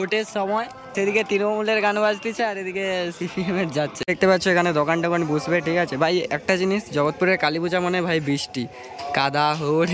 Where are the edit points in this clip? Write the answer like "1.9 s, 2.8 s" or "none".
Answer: 0.9 s, 4.0 s